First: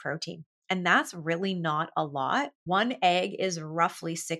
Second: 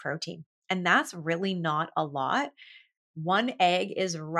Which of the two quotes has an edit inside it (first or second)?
first